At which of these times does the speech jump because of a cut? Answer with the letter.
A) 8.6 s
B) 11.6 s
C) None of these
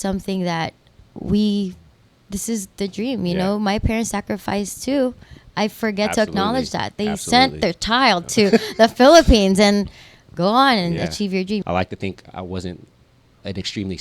B